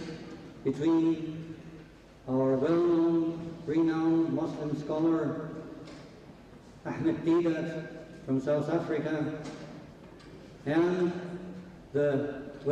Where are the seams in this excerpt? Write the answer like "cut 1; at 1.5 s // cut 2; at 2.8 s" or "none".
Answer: none